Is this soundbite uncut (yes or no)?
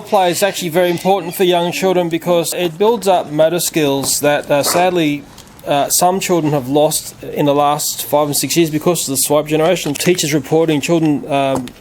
no